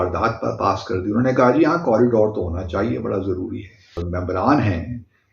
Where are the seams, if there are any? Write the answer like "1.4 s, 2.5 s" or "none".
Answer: 4.0 s